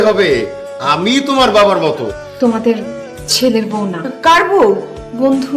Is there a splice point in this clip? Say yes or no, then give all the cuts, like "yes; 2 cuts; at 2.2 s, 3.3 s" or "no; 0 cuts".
yes; 1 cut; at 2.0 s